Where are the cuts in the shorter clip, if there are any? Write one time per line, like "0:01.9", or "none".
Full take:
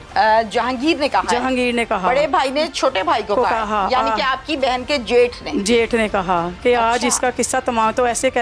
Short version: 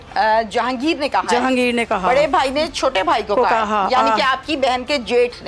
none